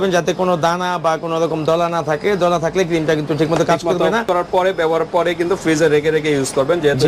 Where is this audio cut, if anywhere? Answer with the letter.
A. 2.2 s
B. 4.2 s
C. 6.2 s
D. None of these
B